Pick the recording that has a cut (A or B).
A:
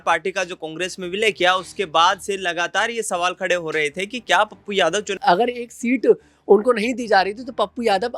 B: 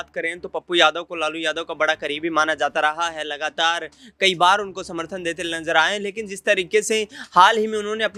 A